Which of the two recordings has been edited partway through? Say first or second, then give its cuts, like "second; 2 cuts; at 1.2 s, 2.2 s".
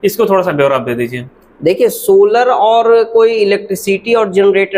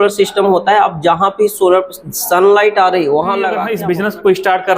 second; 1 cut; at 3.7 s